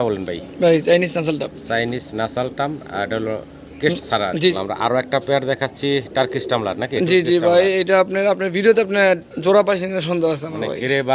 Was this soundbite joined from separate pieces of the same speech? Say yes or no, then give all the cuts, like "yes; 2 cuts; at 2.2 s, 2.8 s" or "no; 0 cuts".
yes; 1 cut; at 4.5 s